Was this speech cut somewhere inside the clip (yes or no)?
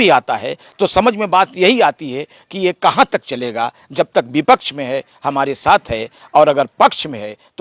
no